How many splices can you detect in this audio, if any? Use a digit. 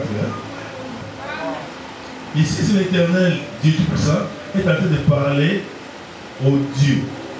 1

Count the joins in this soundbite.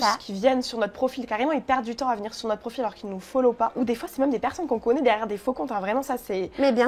1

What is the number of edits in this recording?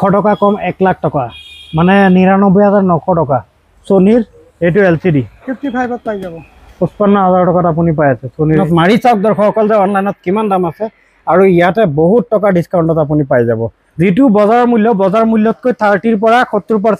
2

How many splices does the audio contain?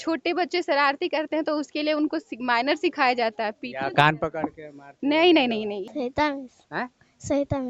1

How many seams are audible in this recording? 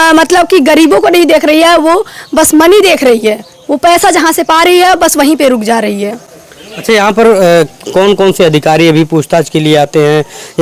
0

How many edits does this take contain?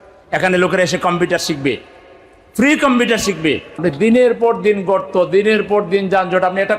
1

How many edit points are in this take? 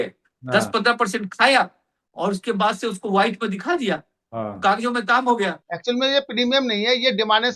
1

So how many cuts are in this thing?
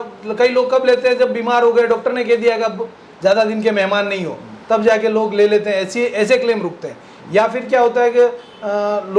0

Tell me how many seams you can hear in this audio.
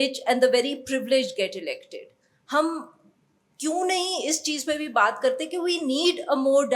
0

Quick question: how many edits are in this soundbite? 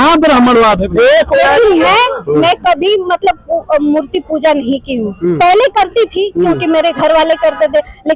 1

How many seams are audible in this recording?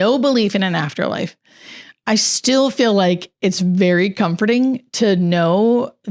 0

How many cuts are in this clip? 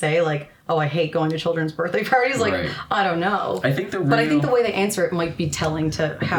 0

